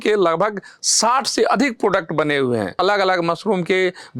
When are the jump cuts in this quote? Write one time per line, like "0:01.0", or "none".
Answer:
0:02.8